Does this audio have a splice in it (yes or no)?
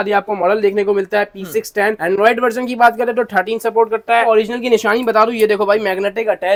no